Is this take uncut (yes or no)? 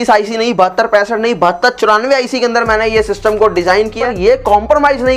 no